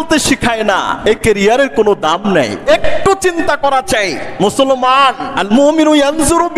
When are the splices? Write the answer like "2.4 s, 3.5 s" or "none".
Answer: 0.9 s, 2.6 s, 5.3 s

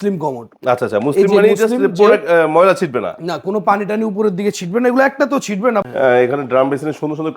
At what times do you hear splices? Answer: 5.8 s

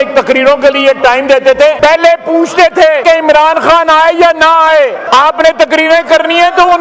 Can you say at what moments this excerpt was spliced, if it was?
1.8 s, 3.0 s, 5.0 s

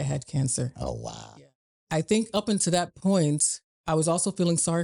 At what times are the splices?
1.2 s

